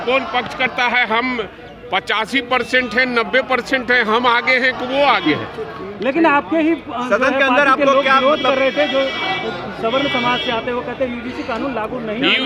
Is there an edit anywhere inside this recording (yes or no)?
no